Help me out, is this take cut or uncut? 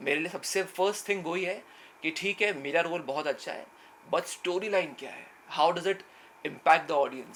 uncut